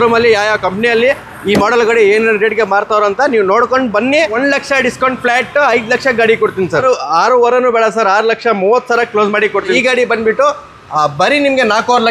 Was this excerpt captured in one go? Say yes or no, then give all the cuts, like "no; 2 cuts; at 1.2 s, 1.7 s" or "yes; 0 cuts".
no; 3 cuts; at 4.4 s, 6.8 s, 9.8 s